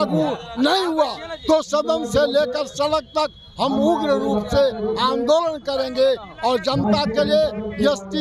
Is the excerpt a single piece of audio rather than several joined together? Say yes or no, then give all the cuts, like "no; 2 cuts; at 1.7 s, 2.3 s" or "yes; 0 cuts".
yes; 0 cuts